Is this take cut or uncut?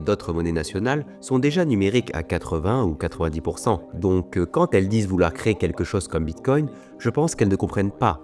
uncut